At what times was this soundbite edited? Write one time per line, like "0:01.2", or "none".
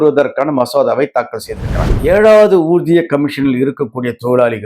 0:01.9